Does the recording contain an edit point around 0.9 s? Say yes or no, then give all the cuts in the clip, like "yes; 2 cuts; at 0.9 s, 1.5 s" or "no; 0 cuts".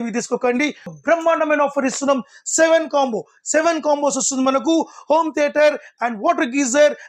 yes; 1 cut; at 0.9 s